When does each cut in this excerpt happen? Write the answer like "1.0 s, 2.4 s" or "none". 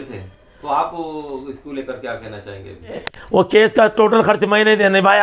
3.0 s